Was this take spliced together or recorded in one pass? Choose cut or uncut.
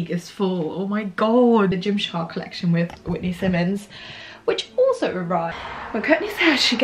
cut